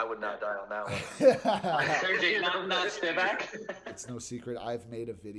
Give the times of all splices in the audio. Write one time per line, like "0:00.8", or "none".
0:03.7

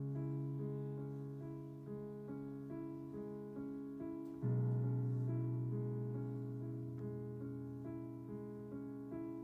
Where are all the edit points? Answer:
none

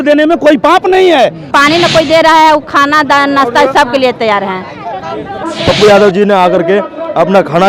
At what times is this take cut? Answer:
0:01.4
0:05.4

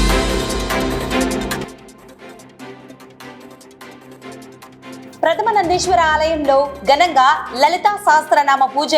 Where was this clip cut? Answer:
0:05.1

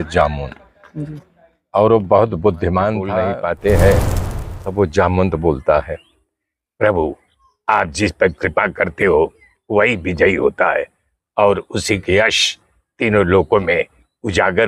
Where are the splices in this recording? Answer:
0:03.2

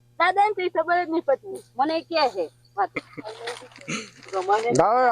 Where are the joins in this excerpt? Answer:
0:02.9

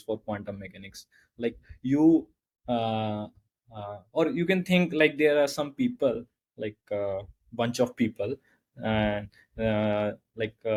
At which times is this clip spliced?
none

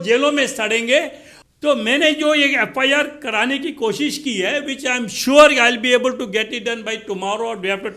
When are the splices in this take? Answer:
0:01.4

